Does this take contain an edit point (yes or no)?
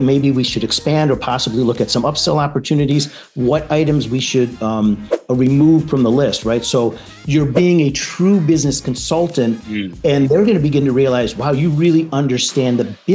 no